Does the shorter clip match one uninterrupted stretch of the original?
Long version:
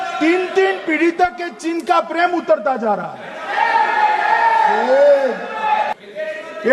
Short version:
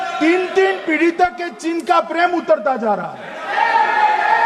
yes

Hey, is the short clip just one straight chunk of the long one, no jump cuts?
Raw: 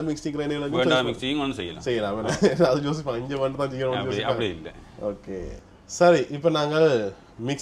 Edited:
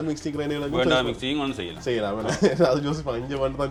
yes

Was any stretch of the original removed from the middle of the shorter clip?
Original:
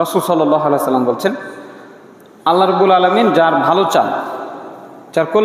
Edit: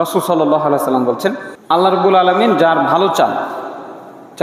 yes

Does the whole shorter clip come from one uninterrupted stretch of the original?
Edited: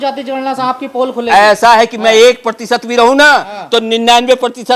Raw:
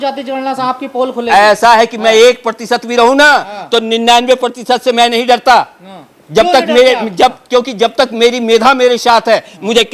yes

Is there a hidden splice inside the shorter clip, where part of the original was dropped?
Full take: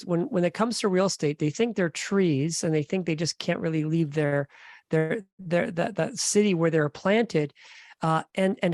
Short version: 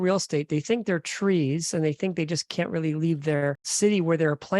yes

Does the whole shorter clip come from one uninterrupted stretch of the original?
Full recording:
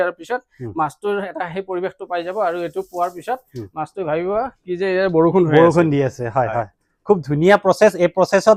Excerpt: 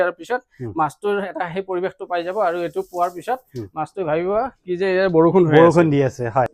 yes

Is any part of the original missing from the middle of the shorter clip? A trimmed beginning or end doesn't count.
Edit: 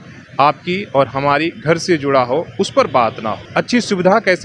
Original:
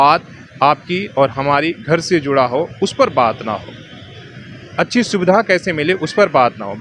yes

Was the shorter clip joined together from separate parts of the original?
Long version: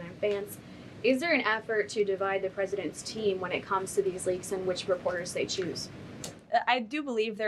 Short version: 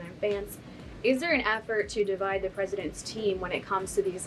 no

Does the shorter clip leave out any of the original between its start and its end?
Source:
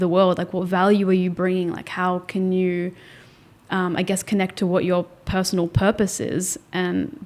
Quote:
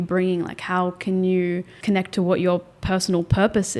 yes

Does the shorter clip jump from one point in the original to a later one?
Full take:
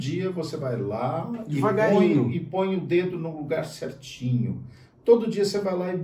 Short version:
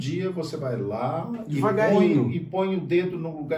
no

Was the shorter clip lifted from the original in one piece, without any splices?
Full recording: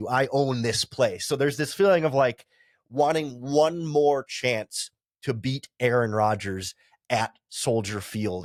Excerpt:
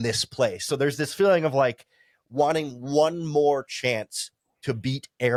yes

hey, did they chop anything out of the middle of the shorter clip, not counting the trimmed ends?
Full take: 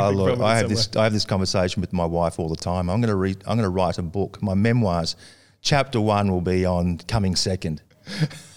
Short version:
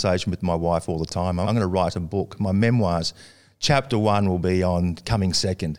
yes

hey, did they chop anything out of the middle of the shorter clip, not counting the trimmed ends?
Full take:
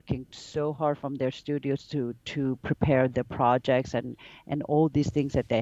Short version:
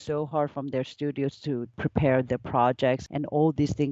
yes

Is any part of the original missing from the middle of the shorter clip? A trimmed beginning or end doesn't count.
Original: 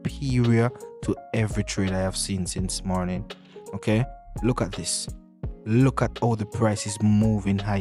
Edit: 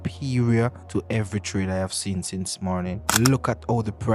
yes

